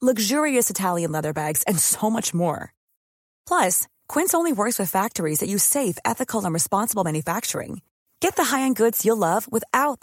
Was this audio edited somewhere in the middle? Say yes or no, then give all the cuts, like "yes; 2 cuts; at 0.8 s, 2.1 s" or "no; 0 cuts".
no; 0 cuts